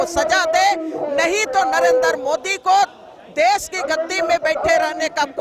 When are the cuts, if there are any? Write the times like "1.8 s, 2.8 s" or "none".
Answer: none